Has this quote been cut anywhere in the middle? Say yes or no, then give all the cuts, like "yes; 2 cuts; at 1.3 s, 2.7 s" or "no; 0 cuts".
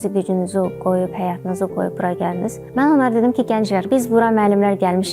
yes; 2 cuts; at 2.6 s, 3.9 s